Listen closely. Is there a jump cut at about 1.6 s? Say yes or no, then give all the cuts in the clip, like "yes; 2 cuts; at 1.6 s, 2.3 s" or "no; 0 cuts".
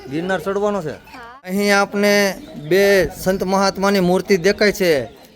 yes; 1 cut; at 1.6 s